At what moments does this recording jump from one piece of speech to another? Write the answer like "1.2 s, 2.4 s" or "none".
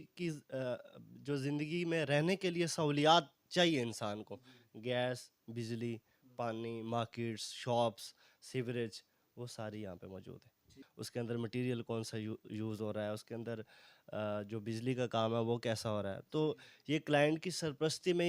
10.8 s